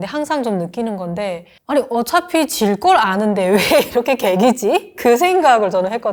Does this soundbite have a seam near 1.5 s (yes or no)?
no